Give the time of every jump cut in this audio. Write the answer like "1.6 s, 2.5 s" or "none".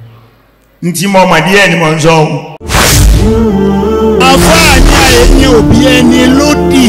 2.7 s